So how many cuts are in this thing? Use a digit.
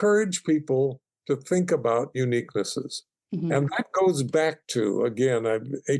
0